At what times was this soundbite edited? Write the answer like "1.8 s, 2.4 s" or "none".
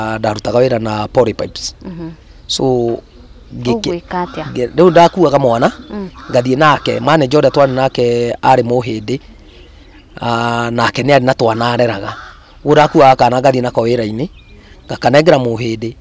none